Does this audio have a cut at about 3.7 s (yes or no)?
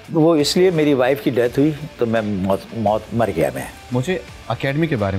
yes